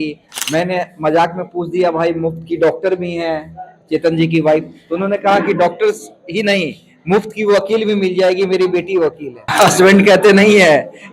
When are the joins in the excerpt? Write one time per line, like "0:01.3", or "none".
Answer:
0:09.5